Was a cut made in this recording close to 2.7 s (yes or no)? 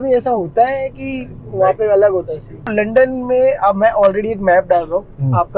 yes